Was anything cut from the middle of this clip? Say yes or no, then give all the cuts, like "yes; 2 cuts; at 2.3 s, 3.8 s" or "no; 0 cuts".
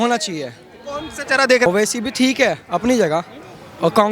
yes; 1 cut; at 1.6 s